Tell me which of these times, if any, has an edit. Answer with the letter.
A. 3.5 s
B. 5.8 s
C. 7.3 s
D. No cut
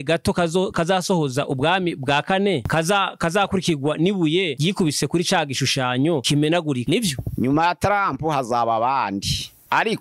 D